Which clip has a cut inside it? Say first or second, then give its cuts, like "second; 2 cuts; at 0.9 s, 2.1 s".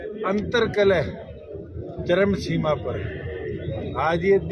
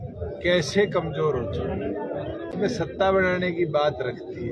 second; 1 cut; at 2.5 s